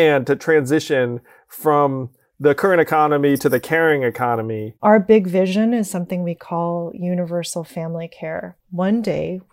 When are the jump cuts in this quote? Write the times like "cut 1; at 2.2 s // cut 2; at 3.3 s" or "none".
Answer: cut 1; at 4.7 s // cut 2; at 8.5 s